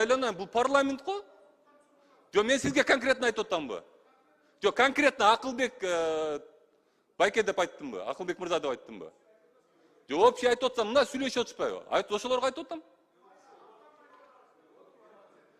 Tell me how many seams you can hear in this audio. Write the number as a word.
zero